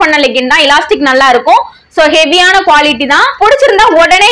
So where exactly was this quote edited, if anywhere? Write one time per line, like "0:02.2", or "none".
0:03.3